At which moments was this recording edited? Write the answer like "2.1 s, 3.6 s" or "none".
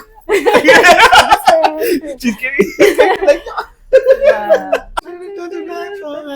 5.1 s